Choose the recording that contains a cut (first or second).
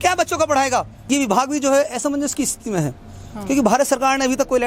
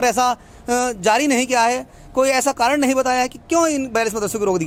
first